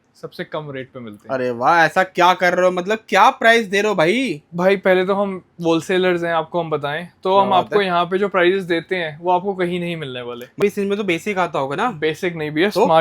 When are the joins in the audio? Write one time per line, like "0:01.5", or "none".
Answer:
0:10.6